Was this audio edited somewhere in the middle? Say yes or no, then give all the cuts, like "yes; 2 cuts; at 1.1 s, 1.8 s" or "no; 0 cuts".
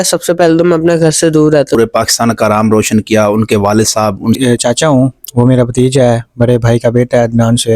yes; 2 cuts; at 1.8 s, 4.4 s